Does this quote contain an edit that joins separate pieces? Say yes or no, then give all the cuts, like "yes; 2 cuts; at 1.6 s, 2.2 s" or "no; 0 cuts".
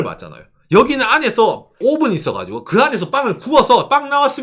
yes; 1 cut; at 1.7 s